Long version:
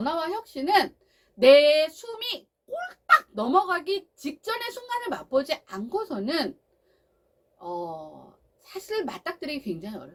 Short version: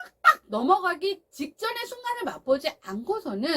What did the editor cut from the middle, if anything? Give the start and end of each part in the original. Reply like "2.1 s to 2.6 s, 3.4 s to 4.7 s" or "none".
none